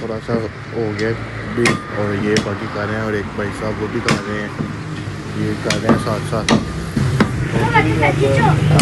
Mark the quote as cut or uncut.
uncut